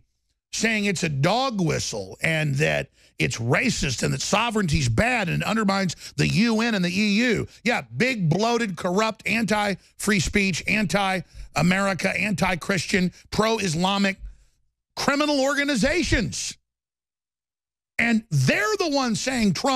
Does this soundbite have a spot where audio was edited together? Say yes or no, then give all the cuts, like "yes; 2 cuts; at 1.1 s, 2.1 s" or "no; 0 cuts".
no; 0 cuts